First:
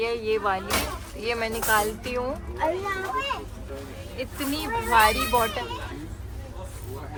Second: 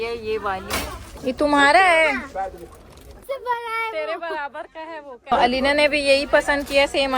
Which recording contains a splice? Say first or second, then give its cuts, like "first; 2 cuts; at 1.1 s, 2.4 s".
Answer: second; 3 cuts; at 1.1 s, 3.2 s, 5.3 s